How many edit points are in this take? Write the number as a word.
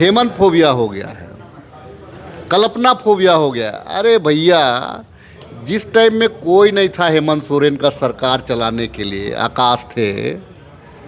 zero